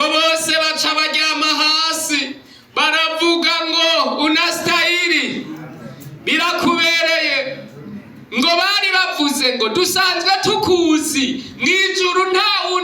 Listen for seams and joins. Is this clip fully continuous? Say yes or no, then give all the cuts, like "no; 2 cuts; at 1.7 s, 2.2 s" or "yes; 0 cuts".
yes; 0 cuts